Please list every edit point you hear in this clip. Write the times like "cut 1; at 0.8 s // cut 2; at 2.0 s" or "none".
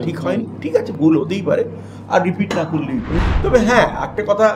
cut 1; at 3.1 s

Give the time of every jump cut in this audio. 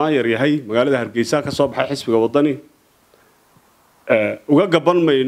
none

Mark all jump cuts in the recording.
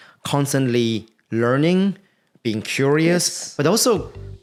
none

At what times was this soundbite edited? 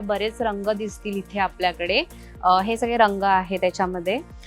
none

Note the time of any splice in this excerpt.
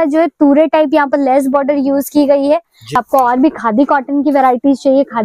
cut 1; at 3.0 s

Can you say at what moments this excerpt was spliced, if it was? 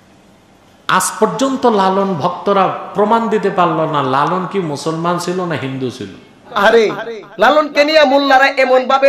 cut 1; at 6.5 s

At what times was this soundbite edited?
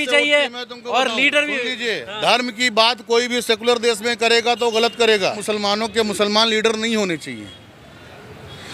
cut 1; at 5.3 s

